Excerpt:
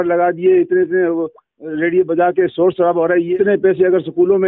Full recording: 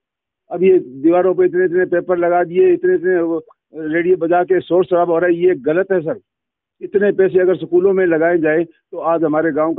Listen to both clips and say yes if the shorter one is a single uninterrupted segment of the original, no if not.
no